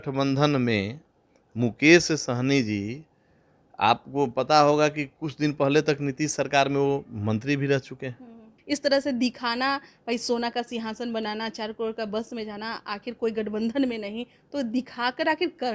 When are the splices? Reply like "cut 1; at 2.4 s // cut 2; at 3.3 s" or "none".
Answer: cut 1; at 8.5 s

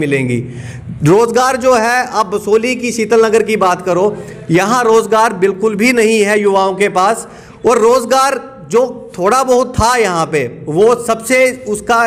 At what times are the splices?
none

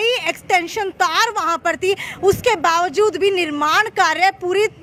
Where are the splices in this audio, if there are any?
none

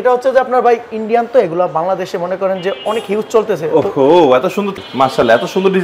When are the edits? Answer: cut 1; at 4.7 s

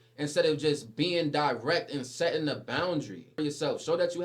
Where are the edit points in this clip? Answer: cut 1; at 3.3 s

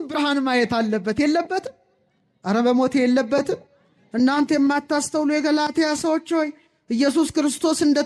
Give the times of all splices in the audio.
none

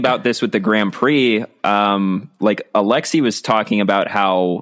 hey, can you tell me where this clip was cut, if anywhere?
none

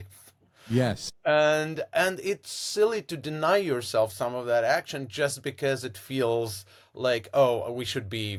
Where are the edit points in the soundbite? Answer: none

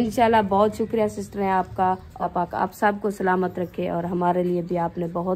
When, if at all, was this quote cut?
cut 1; at 2.3 s

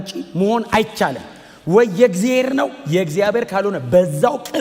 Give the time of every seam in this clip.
none

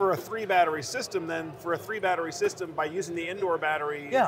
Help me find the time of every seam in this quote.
none

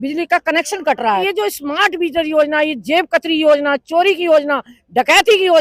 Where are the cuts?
cut 1; at 1.2 s

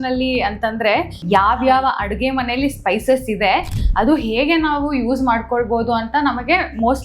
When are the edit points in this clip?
cut 1; at 1.2 s

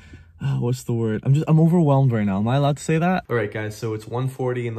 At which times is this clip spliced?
cut 1; at 3.2 s

